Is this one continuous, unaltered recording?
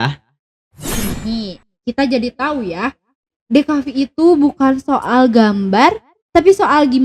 no; 1 cut; at 0.9 s

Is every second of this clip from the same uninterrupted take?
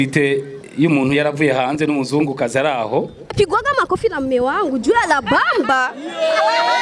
no; 1 cut; at 3.2 s

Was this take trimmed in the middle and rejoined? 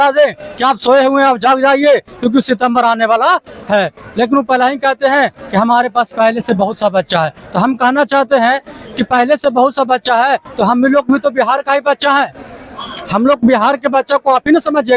no; 0 cuts

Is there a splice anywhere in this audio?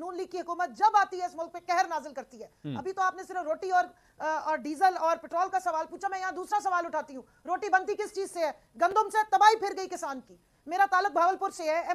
no; 0 cuts

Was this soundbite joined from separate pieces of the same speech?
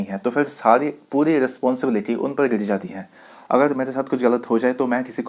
no; 0 cuts

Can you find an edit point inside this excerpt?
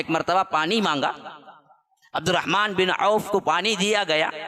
no; 0 cuts

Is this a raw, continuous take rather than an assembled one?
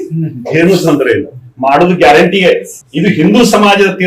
yes; 0 cuts

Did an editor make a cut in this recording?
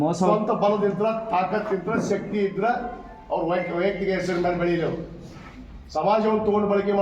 no; 0 cuts

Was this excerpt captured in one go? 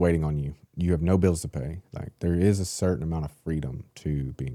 yes; 0 cuts

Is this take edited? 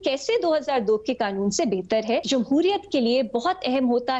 yes; 1 cut; at 2.2 s

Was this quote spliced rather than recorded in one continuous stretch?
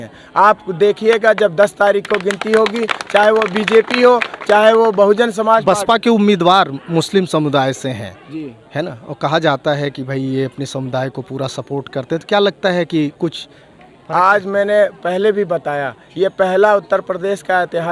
no; 0 cuts

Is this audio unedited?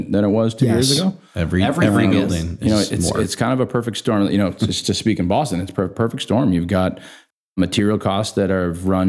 yes; 0 cuts

